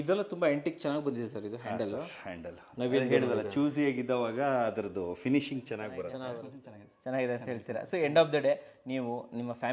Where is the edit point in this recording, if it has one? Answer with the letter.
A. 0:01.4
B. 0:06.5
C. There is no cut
B